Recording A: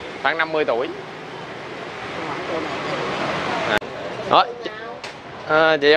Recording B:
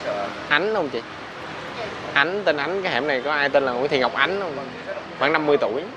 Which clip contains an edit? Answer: A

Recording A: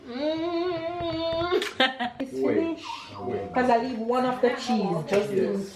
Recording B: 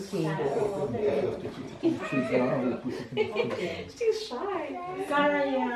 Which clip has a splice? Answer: A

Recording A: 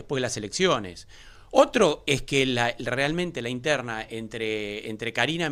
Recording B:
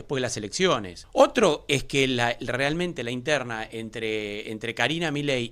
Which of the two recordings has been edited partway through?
B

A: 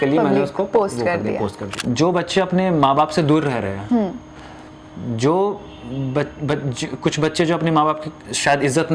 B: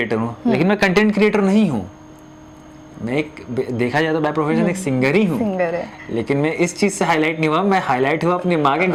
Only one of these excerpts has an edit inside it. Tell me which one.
A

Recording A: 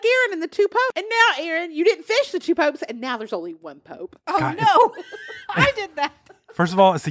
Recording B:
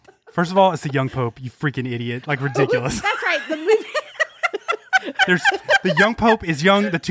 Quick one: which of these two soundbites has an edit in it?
A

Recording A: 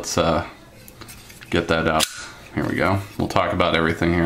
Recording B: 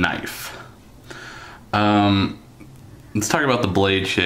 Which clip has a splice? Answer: A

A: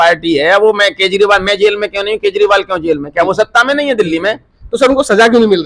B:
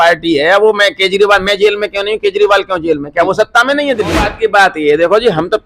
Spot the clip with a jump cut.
B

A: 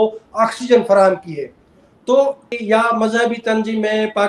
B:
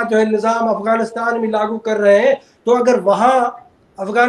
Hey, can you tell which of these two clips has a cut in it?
A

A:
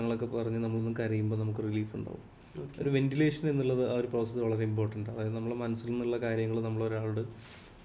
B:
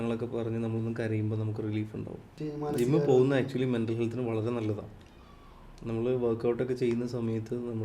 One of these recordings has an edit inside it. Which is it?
B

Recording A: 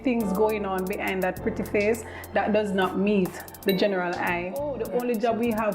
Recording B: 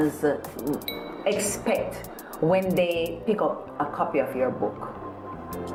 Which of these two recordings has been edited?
A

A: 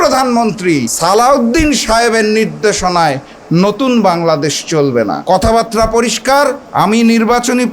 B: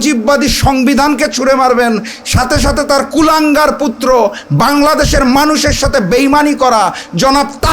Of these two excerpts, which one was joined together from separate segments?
A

